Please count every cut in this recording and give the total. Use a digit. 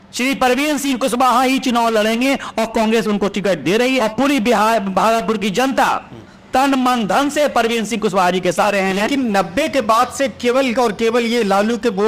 2